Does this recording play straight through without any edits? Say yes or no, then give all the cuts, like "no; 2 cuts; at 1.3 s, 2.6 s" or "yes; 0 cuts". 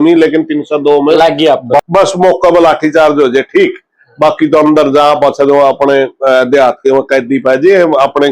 no; 1 cut; at 1.8 s